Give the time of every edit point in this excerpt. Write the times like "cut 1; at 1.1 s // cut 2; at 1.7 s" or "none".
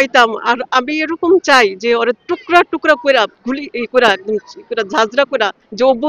none